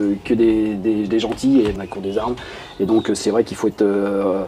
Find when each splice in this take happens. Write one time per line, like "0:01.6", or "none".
0:01.8